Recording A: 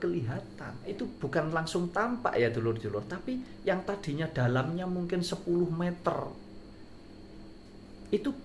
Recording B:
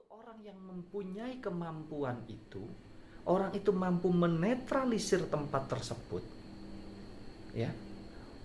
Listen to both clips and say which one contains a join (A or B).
A